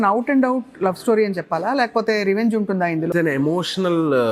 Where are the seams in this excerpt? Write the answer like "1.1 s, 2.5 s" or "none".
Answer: 3.1 s